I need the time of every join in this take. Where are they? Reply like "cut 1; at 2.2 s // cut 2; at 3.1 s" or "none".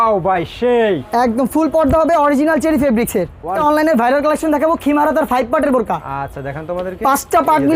cut 1; at 3.5 s